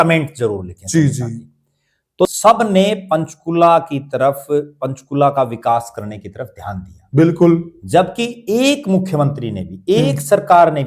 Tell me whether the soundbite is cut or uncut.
cut